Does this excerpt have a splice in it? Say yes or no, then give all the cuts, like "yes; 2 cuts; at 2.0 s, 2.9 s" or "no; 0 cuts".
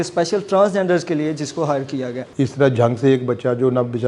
yes; 1 cut; at 2.3 s